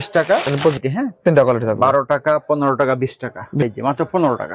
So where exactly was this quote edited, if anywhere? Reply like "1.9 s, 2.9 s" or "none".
0.8 s, 3.6 s